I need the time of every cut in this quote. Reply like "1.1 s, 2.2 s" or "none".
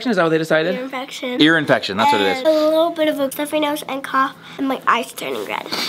none